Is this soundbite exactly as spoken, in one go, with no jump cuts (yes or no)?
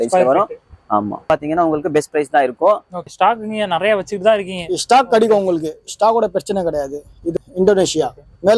no